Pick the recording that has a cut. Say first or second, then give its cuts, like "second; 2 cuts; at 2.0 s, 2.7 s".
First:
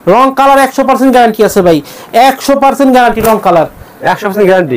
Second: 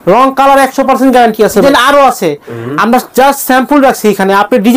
second; 1 cut; at 1.6 s